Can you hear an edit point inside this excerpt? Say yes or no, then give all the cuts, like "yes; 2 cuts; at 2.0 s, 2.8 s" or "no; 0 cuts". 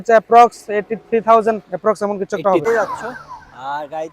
yes; 1 cut; at 2.7 s